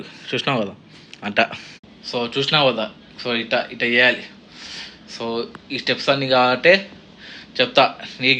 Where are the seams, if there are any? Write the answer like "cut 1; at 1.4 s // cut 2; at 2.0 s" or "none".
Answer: cut 1; at 4.4 s